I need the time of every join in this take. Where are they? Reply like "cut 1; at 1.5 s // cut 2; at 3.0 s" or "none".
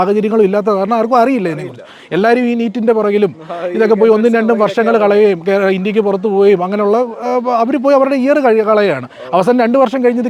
none